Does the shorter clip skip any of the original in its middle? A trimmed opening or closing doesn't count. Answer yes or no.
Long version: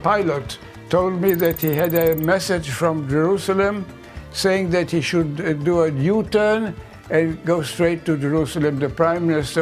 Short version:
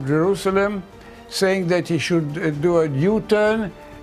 no